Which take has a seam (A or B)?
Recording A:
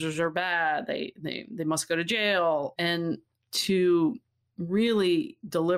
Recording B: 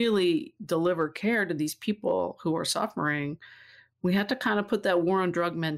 A